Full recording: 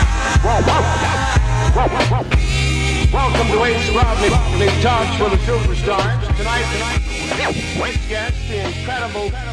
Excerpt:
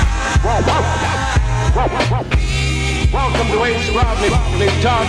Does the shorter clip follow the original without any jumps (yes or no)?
yes